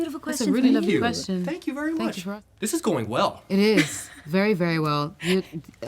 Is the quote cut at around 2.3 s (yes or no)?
yes